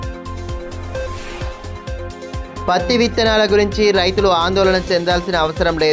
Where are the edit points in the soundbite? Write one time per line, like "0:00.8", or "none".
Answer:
none